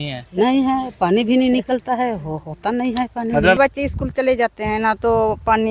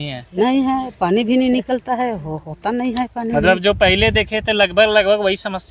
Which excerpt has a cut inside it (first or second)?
first